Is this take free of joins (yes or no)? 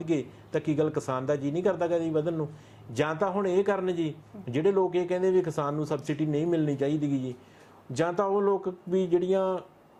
yes